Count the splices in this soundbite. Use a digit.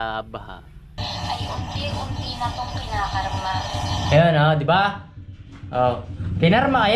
1